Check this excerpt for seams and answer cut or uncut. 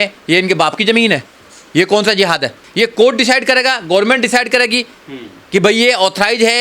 cut